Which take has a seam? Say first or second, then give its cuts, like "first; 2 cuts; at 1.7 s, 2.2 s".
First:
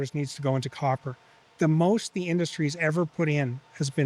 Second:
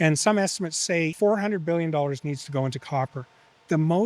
second; 1 cut; at 1.1 s